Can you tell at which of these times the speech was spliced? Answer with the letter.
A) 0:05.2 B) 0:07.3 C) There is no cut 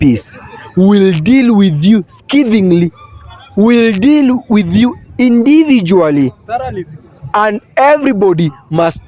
C